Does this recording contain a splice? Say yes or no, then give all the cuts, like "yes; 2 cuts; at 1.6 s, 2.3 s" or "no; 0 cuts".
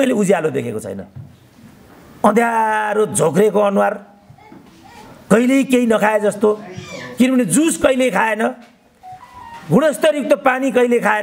no; 0 cuts